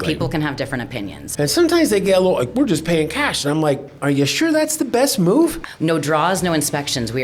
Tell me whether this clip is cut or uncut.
cut